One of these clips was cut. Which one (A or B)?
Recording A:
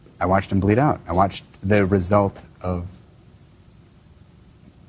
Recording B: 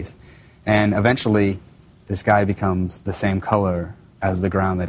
A